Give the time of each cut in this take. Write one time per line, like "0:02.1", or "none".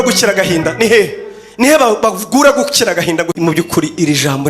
0:03.3